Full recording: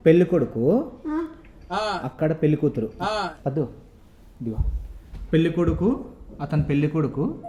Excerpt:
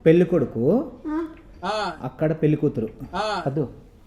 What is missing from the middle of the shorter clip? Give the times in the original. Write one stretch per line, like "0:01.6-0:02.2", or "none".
none